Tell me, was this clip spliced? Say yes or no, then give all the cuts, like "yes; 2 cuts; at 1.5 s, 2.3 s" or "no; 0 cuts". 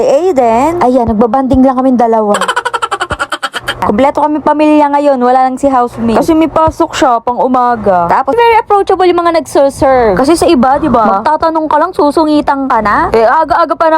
yes; 2 cuts; at 3.8 s, 8.3 s